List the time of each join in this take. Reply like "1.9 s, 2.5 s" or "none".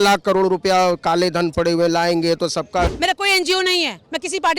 2.9 s